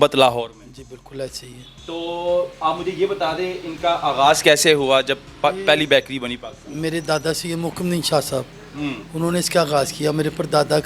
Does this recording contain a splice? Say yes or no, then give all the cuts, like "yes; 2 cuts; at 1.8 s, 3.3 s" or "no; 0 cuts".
no; 0 cuts